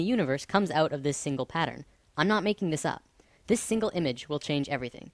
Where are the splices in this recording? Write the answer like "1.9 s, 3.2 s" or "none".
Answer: 4.1 s